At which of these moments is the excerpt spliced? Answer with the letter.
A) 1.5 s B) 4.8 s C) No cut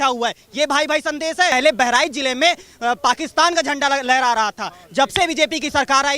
A